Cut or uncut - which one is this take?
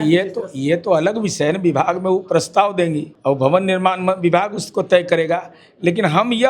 cut